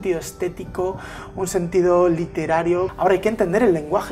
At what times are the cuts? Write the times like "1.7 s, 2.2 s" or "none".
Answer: 2.9 s